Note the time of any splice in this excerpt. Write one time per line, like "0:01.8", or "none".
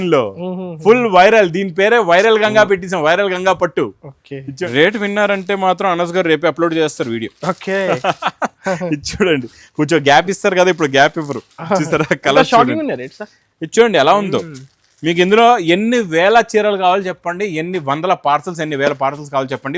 0:04.5

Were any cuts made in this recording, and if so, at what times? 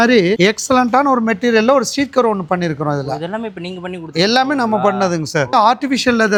none

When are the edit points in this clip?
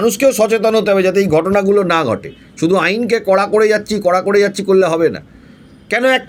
none

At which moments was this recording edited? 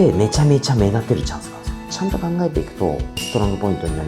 0:01.7

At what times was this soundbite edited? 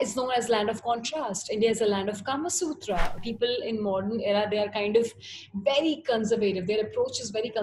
0:03.2

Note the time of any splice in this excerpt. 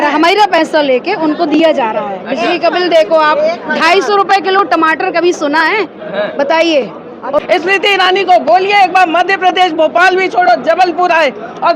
0:07.4

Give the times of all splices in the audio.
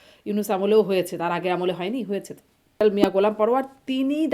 0:02.8

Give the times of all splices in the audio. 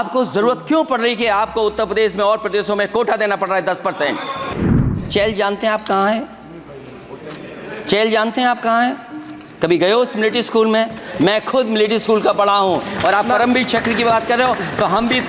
0:05.0

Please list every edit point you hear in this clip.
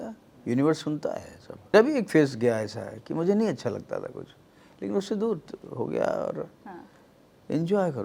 0:01.7

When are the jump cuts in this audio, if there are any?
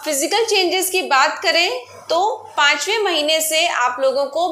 none

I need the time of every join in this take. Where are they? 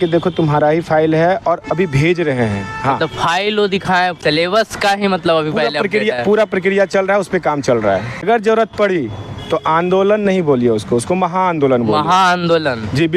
0:04.2
0:08.2

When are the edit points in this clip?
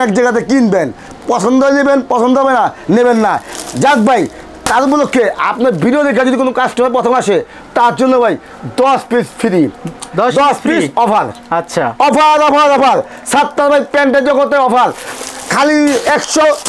none

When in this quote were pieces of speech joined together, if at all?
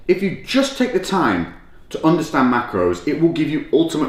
none

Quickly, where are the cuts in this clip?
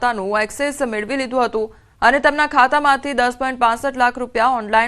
0:02.2

